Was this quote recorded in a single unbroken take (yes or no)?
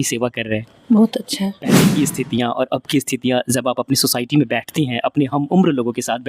no